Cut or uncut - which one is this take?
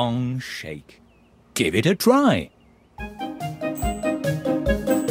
uncut